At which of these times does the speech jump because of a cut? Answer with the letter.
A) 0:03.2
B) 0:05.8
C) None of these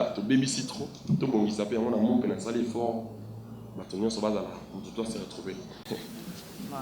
B